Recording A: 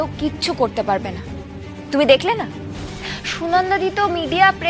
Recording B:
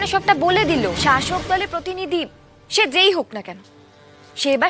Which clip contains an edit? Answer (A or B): B